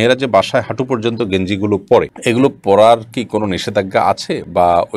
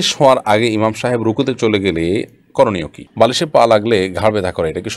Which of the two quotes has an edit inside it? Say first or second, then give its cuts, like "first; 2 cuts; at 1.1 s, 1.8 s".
second; 1 cut; at 3.1 s